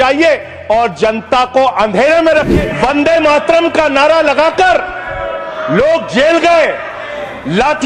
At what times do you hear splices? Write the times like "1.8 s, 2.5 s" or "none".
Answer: 2.5 s